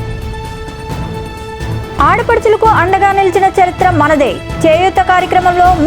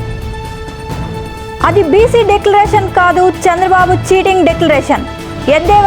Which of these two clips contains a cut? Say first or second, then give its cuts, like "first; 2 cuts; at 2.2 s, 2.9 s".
second; 1 cut; at 1.1 s